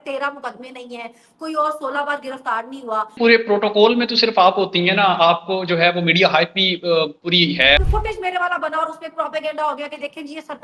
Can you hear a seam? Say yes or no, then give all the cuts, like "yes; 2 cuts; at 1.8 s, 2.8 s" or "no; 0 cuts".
yes; 2 cuts; at 3.2 s, 7.8 s